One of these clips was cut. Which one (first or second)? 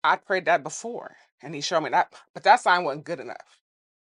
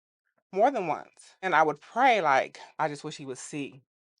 second